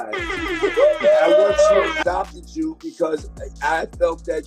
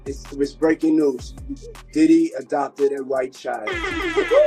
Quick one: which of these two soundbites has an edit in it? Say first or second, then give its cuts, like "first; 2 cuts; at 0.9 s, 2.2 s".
first; 1 cut; at 2.0 s